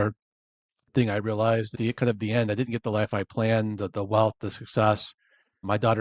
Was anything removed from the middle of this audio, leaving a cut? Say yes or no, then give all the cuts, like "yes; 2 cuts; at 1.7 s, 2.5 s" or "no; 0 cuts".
yes; 1 cut; at 1.8 s